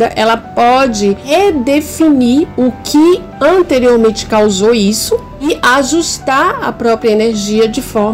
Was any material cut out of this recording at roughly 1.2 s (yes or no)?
yes